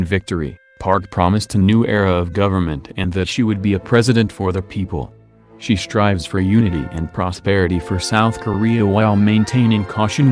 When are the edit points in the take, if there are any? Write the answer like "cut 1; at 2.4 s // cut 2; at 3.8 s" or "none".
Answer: none